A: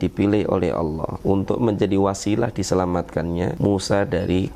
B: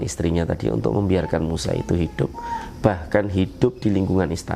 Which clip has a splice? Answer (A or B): A